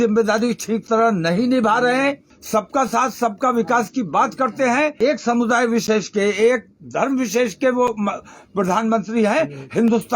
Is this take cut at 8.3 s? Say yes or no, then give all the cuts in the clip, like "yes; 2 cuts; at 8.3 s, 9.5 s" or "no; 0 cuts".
no; 2 cuts; at 2.3 s, 4.9 s